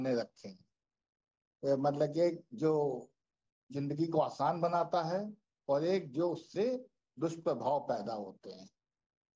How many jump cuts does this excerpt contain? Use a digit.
0